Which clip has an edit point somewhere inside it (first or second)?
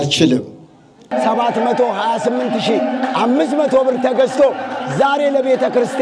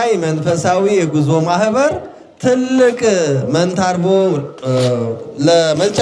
first